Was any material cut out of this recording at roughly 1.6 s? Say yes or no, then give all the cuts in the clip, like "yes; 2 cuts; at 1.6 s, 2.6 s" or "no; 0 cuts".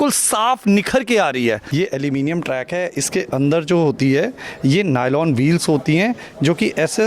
yes; 1 cut; at 1.6 s